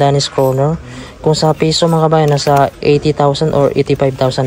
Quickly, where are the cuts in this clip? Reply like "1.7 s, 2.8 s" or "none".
2.7 s